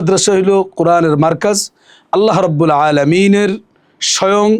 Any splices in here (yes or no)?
no